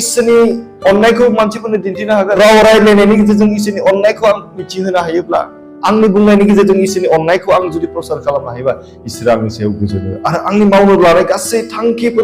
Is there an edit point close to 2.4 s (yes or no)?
yes